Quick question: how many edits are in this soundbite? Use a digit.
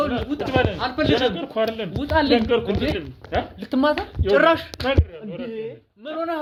0